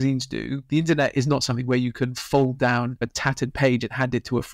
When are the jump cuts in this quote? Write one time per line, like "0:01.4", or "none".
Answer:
0:03.0